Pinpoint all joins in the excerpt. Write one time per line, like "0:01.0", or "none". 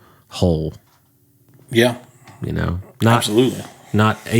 none